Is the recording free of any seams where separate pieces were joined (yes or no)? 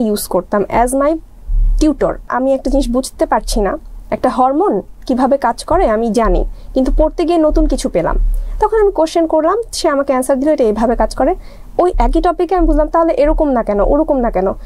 no